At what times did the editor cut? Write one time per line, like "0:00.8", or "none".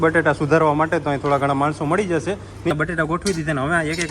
0:02.7